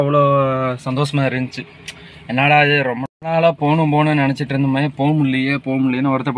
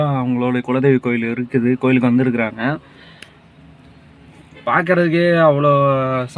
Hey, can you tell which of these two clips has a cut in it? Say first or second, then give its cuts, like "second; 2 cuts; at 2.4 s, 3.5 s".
first; 1 cut; at 3.1 s